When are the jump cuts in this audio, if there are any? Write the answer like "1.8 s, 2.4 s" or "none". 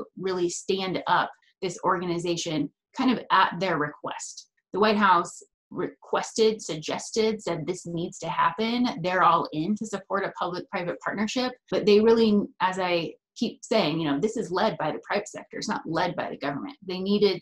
1.4 s, 4.5 s, 11.7 s

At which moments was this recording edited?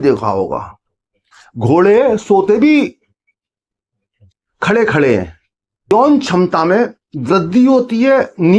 5.9 s

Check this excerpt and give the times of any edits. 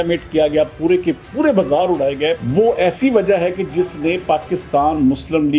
2.4 s

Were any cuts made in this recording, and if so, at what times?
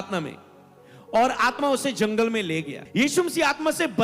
2.8 s

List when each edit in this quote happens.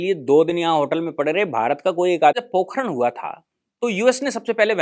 2.4 s

